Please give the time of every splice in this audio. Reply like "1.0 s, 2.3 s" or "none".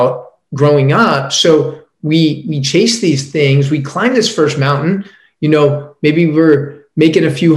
none

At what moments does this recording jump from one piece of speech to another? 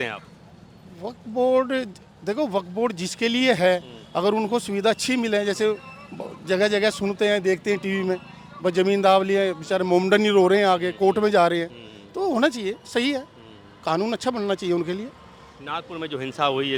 none

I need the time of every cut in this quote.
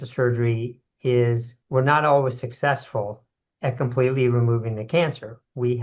1.5 s

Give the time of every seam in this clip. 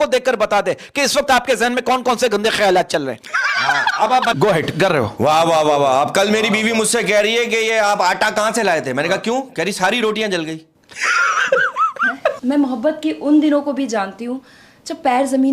4.3 s, 12.4 s

